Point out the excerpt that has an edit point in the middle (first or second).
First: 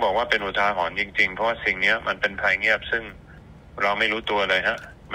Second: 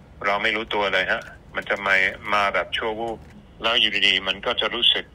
second